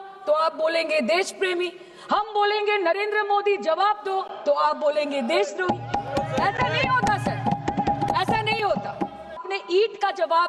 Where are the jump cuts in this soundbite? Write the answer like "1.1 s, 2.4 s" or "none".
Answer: 9.4 s